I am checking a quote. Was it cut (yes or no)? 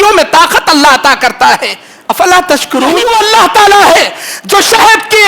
yes